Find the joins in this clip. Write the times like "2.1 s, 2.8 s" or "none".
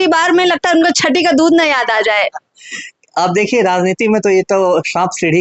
none